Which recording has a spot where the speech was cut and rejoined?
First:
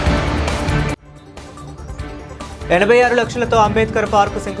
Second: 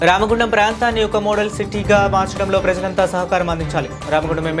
first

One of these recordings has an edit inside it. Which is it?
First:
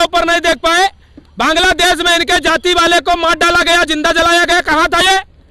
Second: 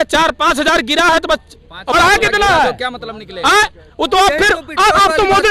second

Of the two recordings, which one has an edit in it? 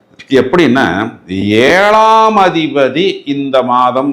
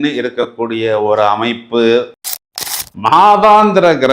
second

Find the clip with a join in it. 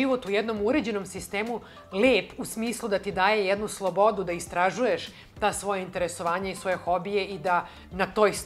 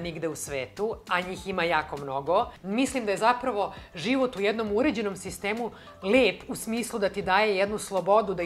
second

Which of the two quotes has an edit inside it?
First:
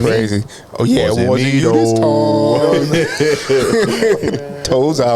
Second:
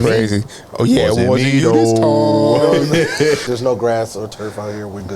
second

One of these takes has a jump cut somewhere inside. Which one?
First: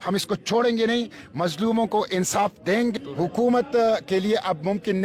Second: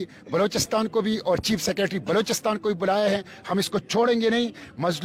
first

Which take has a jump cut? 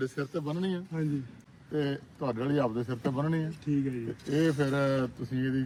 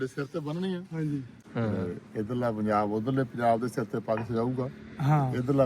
second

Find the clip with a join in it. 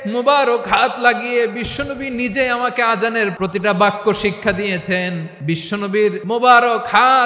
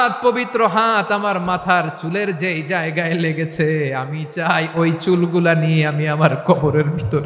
first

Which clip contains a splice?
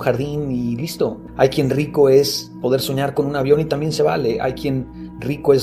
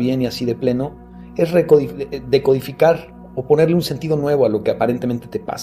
first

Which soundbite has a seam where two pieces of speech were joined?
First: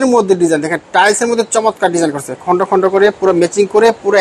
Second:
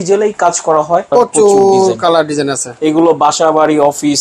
second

